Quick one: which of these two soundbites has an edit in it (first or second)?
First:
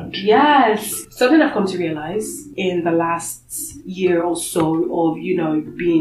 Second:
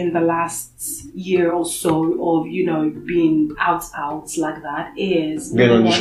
first